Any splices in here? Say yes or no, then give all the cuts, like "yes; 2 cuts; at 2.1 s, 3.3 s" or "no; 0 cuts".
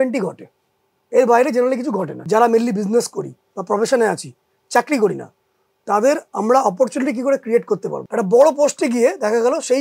yes; 2 cuts; at 2.1 s, 8.0 s